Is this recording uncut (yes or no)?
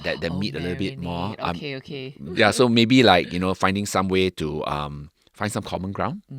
no